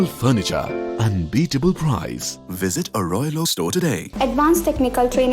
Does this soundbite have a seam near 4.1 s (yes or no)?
yes